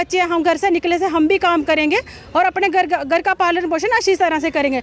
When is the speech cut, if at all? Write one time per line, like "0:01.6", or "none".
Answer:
none